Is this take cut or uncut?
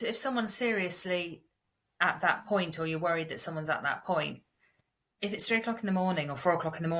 uncut